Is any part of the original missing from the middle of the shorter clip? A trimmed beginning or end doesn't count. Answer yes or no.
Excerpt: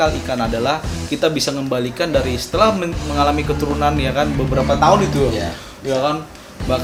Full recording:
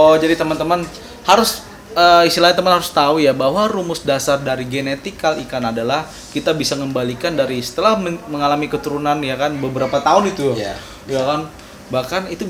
no